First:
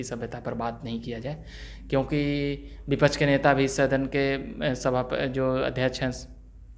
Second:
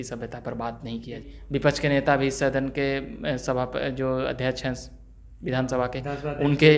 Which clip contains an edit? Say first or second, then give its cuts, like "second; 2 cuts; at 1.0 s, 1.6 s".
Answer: second; 1 cut; at 1.3 s